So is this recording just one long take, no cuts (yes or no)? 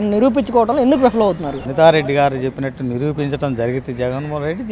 no